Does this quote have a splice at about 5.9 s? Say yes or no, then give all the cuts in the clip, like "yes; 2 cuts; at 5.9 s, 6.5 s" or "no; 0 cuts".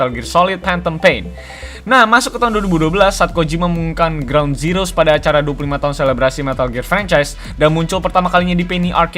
no; 1 cut; at 2.0 s